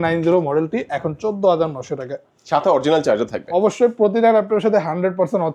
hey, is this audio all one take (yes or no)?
yes